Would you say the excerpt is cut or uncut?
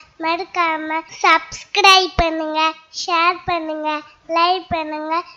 cut